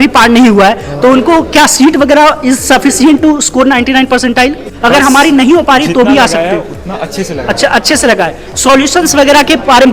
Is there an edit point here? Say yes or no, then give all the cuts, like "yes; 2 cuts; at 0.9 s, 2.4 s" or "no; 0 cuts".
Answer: yes; 1 cut; at 4.7 s